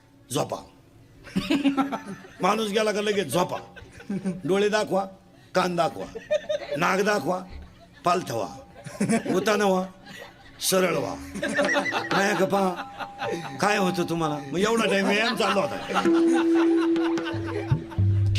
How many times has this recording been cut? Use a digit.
1